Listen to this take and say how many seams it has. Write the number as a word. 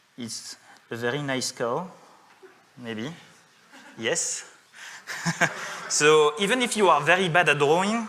zero